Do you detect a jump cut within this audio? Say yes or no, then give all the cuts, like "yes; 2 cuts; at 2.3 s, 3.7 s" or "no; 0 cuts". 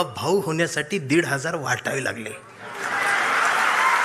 no; 0 cuts